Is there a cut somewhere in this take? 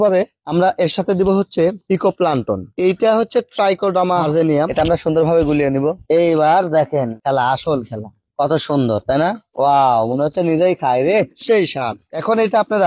yes; 1 cut; at 4.7 s

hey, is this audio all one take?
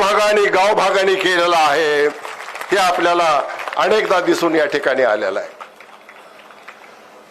yes; 0 cuts

